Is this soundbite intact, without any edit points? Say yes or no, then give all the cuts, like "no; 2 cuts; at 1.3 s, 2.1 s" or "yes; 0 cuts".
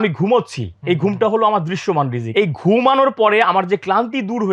no; 1 cut; at 2.2 s